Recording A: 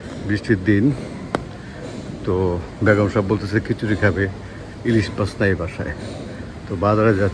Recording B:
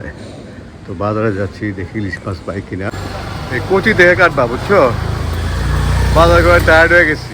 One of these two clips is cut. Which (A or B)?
B